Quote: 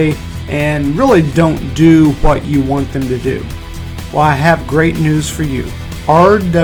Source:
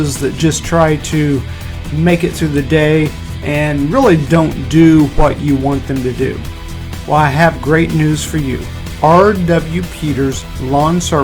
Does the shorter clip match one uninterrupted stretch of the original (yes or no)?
yes